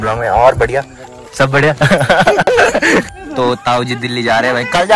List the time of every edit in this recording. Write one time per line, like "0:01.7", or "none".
none